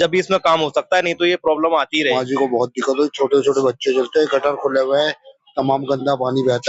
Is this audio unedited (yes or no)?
no